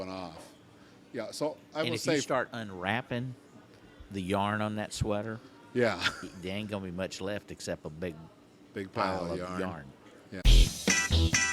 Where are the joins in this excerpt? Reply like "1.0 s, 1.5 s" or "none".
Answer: 10.2 s